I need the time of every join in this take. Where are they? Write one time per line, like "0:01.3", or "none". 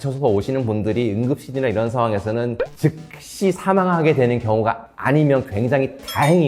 0:02.5